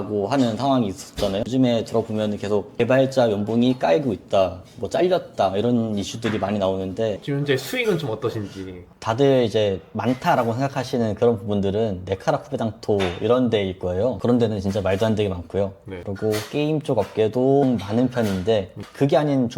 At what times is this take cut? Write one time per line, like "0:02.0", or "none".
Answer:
0:07.2